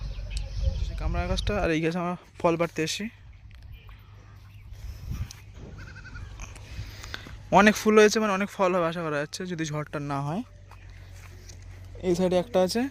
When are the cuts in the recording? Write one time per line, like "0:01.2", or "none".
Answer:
0:01.1

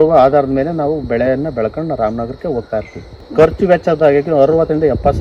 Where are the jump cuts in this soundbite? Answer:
0:03.2

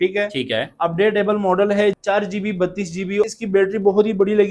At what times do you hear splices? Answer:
0:02.0
0:03.2

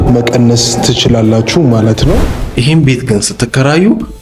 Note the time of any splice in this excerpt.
0:02.4

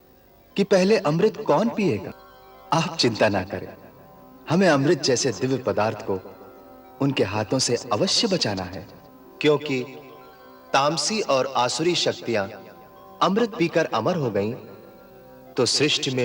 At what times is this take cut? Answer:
none

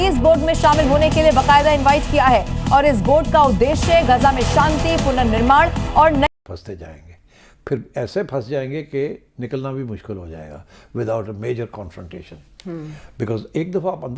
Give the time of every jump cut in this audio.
0:06.3

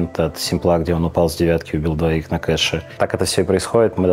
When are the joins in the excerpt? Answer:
0:02.9

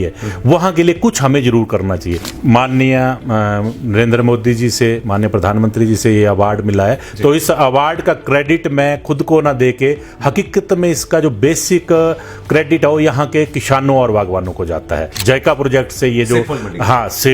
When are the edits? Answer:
0:02.3
0:15.1

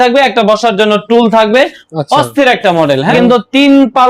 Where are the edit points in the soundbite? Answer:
0:03.1

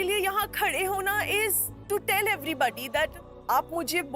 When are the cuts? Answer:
0:01.7

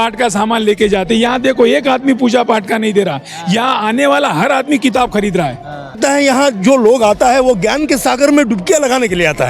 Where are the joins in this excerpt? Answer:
0:06.0

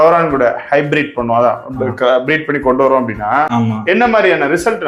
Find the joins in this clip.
none

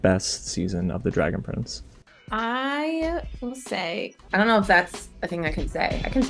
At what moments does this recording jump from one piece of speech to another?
0:04.2

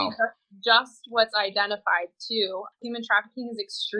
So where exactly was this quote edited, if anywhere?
none

